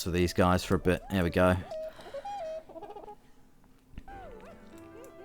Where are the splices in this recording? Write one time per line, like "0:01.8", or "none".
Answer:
0:01.7
0:04.1